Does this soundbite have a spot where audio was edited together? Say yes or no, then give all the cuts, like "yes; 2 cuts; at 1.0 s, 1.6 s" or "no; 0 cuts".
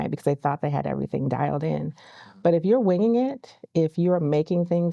no; 0 cuts